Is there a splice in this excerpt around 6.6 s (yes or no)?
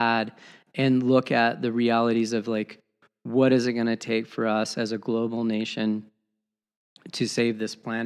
no